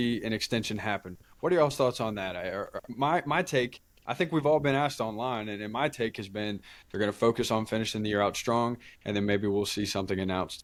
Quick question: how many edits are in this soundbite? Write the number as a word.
zero